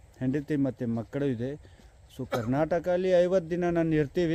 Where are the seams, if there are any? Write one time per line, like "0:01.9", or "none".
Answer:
none